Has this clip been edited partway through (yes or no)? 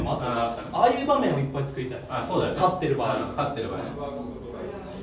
no